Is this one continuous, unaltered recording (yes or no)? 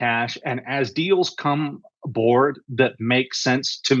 yes